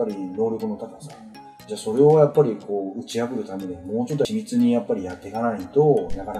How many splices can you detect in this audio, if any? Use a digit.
1